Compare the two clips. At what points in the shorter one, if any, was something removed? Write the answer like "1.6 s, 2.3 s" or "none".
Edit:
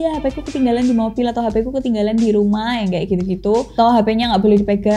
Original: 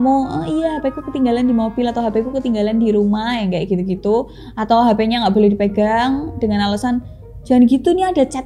3.7 s